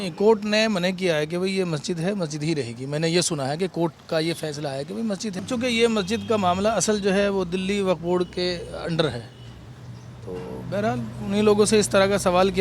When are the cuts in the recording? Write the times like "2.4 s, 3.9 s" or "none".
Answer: 5.3 s